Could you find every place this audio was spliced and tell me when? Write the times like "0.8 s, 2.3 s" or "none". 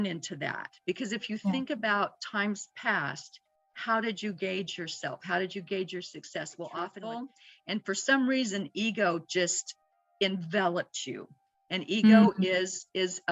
7.0 s